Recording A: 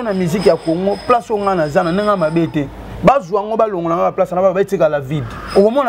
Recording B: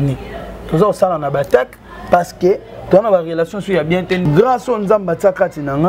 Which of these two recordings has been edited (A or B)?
B